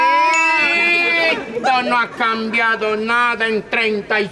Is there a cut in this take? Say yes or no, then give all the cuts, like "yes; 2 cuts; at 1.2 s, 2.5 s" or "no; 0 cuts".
no; 0 cuts